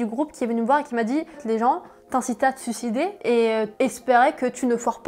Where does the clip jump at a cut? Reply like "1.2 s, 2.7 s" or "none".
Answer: none